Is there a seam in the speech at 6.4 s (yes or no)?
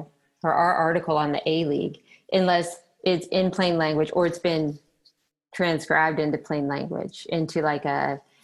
no